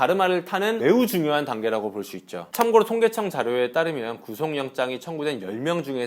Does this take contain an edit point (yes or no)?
yes